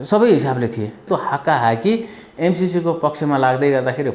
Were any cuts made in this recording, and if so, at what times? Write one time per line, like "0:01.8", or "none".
0:01.1